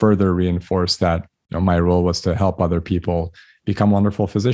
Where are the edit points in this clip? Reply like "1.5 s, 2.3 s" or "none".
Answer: none